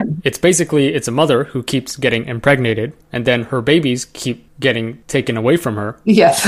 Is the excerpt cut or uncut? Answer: uncut